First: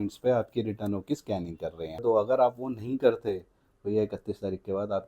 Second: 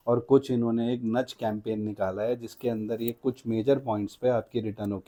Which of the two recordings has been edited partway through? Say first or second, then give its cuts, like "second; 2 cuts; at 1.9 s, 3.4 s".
first; 1 cut; at 2.0 s